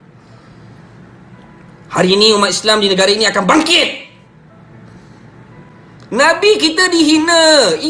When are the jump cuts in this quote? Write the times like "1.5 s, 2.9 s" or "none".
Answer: 5.7 s